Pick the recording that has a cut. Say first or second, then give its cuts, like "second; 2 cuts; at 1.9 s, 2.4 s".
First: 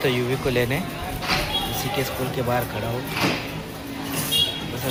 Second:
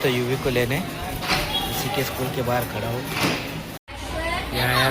second; 1 cut; at 3.8 s